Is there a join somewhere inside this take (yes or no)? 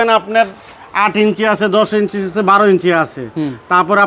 no